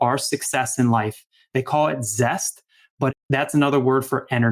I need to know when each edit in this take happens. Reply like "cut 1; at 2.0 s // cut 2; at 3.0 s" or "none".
cut 1; at 3.2 s